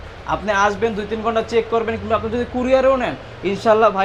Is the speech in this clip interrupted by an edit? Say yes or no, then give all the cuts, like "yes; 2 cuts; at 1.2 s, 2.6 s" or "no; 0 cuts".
no; 0 cuts